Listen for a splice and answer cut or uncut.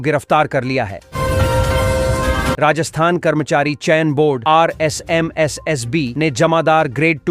cut